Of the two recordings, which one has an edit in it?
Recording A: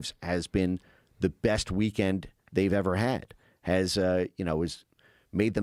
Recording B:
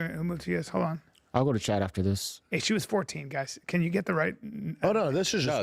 B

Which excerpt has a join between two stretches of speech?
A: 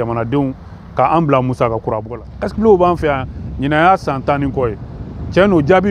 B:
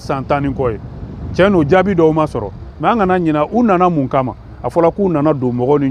A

